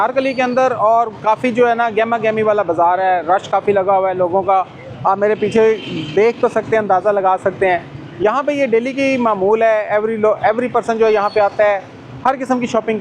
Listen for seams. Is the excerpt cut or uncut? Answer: uncut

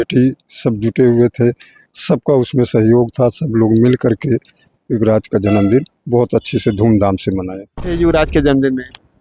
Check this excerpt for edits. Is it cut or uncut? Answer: cut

